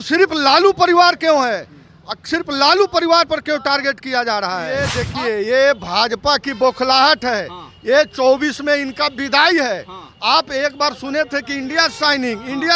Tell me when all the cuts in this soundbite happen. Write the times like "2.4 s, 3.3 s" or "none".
5.0 s